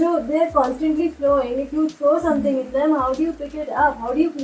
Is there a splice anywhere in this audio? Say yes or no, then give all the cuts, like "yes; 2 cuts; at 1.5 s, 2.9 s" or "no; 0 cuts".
no; 0 cuts